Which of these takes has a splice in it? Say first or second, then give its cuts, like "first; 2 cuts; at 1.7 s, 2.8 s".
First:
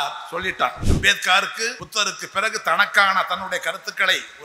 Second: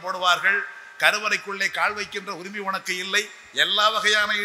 first; 2 cuts; at 0.9 s, 1.8 s